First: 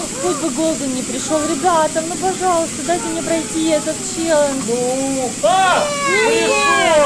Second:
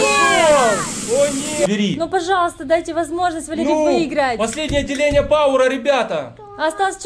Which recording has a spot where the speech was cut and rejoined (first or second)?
second